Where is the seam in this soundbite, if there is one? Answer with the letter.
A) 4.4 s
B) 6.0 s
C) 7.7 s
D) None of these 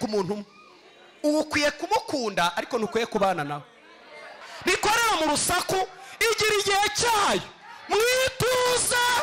A